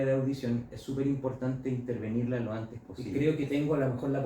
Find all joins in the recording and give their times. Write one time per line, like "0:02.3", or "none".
0:03.0